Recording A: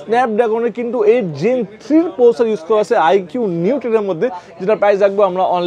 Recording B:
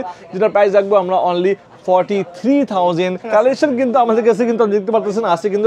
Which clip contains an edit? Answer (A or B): B